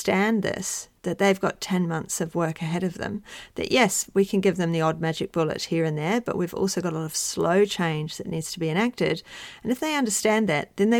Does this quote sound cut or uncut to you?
uncut